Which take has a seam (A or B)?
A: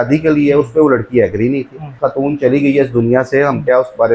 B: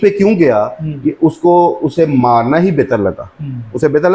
A